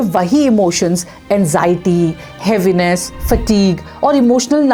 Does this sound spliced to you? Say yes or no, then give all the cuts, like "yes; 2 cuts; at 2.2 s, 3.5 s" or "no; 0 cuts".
no; 0 cuts